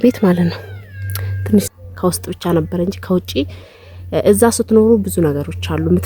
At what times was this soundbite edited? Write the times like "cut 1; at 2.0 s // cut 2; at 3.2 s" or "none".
cut 1; at 1.7 s

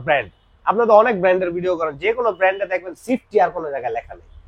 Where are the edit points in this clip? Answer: none

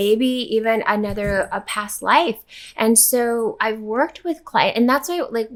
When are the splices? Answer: none

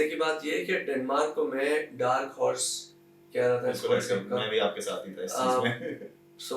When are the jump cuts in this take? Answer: none

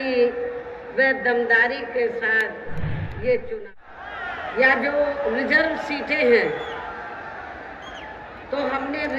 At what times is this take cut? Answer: cut 1; at 3.7 s

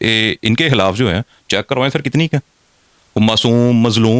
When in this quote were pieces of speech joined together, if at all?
none

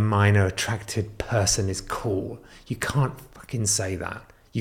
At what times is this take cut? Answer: none

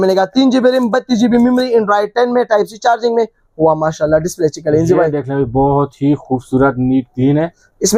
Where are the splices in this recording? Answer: none

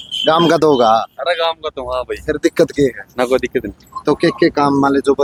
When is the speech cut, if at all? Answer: none

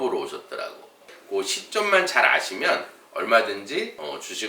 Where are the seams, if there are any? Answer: cut 1; at 1.1 s

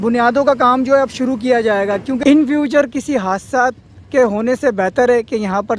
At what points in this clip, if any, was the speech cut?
cut 1; at 2.2 s

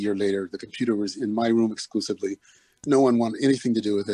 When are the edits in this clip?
none

